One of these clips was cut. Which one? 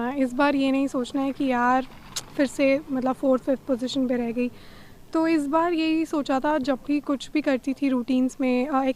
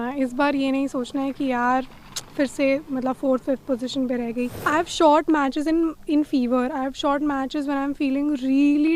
second; 1 cut; at 4.6 s

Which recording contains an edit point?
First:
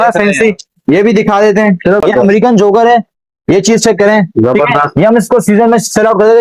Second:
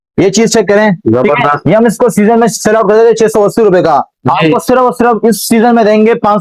first; 1 cut; at 2.0 s

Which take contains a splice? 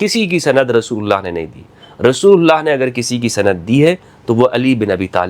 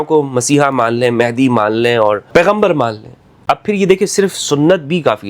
second; 2 cuts; at 2.3 s, 3.4 s

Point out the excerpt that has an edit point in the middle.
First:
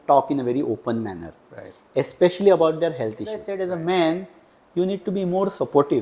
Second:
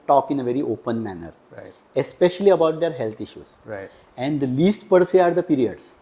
first; 1 cut; at 3.5 s

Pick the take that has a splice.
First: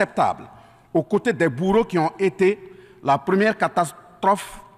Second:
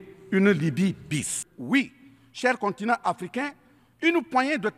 second; 1 cut; at 1.4 s

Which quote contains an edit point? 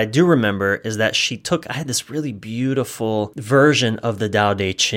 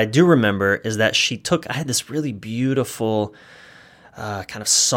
first; 1 cut; at 3.4 s

